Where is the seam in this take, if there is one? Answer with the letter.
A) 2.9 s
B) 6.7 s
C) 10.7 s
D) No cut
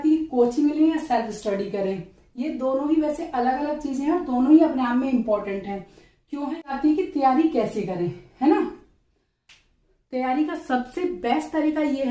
B